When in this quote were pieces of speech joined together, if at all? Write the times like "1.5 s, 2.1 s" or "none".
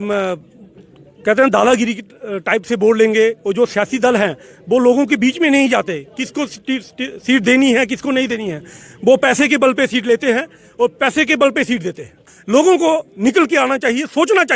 12.3 s